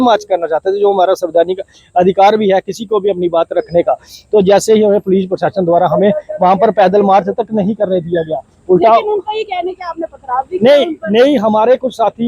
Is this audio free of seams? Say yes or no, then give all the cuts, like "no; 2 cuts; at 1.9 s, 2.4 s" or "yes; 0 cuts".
yes; 0 cuts